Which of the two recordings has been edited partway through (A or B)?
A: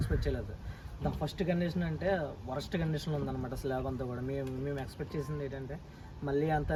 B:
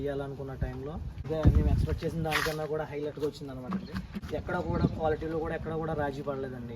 B